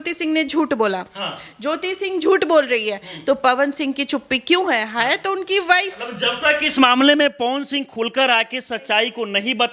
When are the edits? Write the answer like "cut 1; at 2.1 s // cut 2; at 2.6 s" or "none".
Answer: none